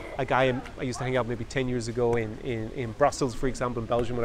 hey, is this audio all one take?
yes; 0 cuts

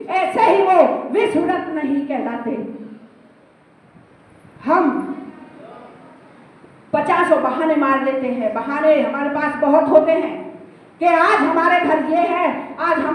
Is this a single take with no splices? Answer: yes; 0 cuts

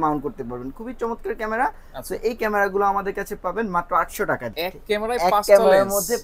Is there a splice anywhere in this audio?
yes; 1 cut; at 4.5 s

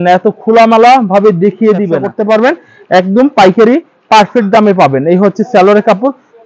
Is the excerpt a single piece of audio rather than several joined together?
no; 1 cut; at 2.1 s

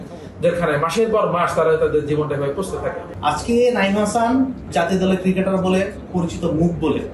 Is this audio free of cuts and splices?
no; 3 cuts; at 3.1 s, 4.7 s, 6.0 s

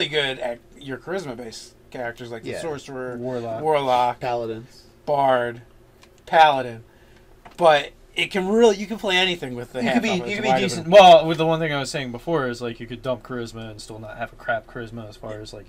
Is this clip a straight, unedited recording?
no; 1 cut; at 13.3 s

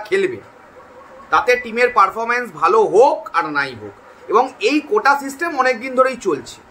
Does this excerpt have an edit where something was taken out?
no; 0 cuts

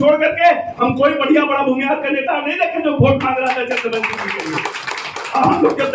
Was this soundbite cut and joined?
no; 0 cuts

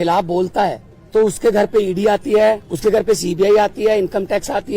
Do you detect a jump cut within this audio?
yes; 2 cuts; at 0.9 s, 2.7 s

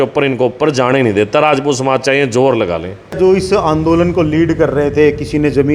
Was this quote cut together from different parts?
yes; 1 cut; at 3.2 s

